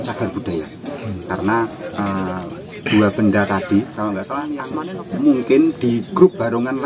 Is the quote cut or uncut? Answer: cut